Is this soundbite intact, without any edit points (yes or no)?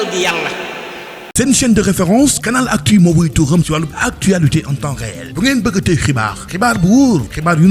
no